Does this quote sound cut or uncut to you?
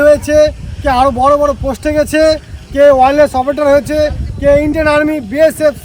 uncut